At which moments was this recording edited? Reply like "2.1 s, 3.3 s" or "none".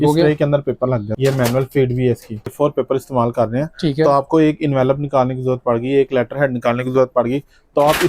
1.1 s, 2.5 s